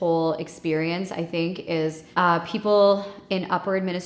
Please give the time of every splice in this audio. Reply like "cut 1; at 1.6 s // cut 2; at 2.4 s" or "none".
none